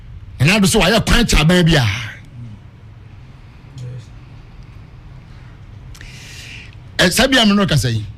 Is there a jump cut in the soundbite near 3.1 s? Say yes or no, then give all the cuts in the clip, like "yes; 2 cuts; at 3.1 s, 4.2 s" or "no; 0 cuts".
no; 0 cuts